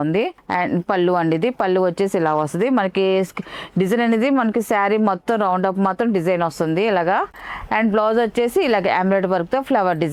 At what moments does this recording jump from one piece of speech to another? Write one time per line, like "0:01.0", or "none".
none